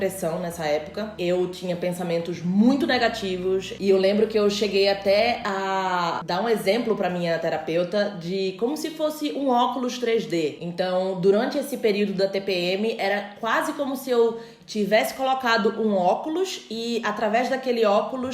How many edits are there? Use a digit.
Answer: 0